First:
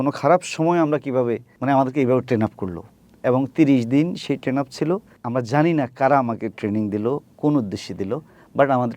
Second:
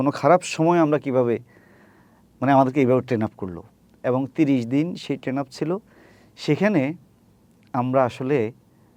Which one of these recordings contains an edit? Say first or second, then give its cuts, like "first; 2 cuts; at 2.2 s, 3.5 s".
first; 2 cuts; at 1.5 s, 5.1 s